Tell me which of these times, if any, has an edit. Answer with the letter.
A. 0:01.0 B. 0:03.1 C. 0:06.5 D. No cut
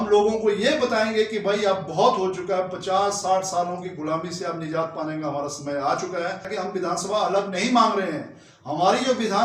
C